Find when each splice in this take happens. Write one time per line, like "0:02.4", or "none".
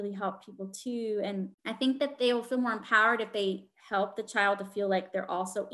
0:01.6

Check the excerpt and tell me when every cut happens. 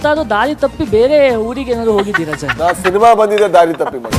none

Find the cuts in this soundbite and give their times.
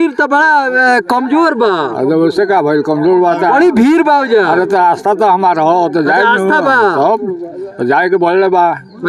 none

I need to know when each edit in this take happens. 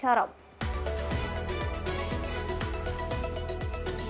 none

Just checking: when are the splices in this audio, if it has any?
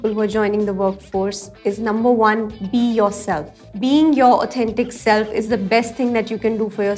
none

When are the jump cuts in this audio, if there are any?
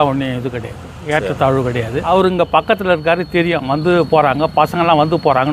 0:02.1

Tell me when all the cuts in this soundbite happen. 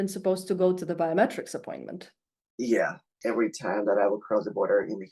0:03.2

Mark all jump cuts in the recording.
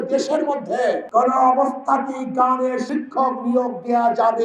0:01.0
0:02.9

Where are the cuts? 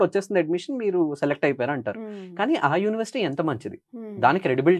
none

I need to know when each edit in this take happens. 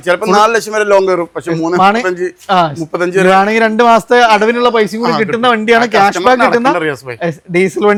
none

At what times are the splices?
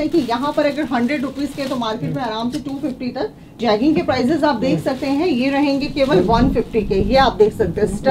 0:03.6

